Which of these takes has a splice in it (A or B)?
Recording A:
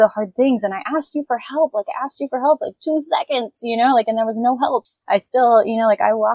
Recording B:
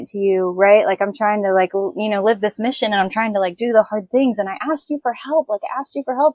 A